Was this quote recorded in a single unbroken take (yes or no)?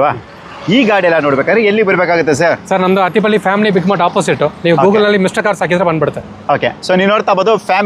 yes